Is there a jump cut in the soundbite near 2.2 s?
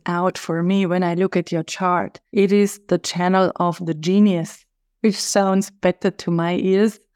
yes; 1 cut; at 2.2 s

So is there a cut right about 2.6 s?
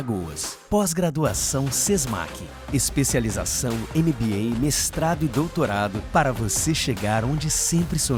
no; 0 cuts

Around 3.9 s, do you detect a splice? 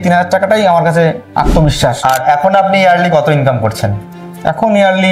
no; 1 cut; at 2.0 s

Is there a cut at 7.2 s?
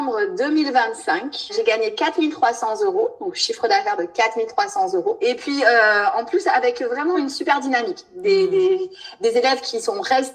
yes; 3 cuts; at 1.5 s, 5.2 s, 7.2 s

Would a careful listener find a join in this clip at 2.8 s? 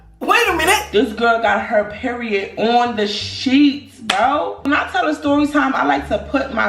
no; 1 cut; at 4.7 s

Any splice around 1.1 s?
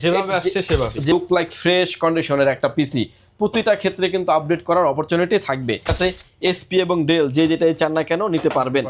yes; 2 cuts; at 1.1 s, 5.9 s

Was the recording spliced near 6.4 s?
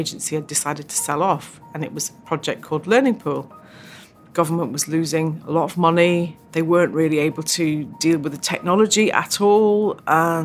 yes; 1 cut; at 6.4 s

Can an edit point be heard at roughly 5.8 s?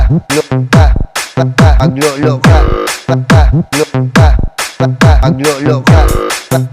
yes; 1 cut; at 5.8 s

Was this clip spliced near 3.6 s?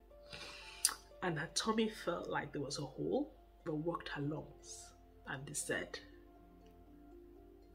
yes; 1 cut; at 3.6 s

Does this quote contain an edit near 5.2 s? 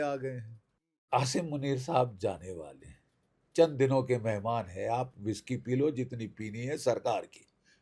no; 1 cut; at 1.0 s

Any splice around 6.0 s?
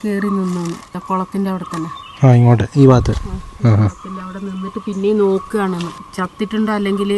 yes; 2 cuts; at 1.0 s, 6.0 s

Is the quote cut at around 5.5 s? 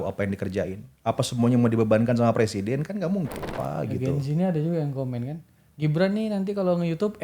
no; 1 cut; at 3.5 s

